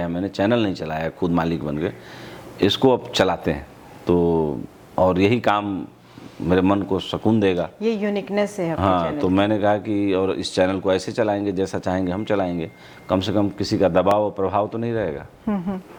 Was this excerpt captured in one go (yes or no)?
yes